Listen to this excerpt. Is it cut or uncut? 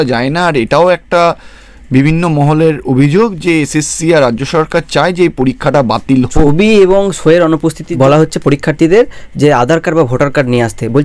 cut